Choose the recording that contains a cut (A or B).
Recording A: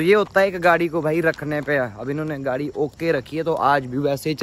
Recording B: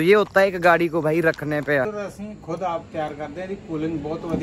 B